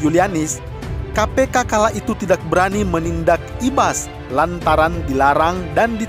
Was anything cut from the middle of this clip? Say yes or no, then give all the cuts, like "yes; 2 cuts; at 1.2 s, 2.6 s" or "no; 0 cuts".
no; 0 cuts